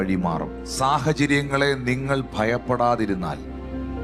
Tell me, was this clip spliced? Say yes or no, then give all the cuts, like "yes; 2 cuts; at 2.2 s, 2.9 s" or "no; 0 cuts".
no; 0 cuts